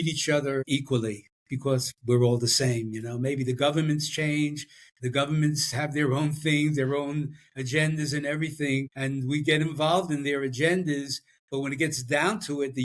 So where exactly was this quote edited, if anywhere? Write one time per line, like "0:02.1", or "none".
none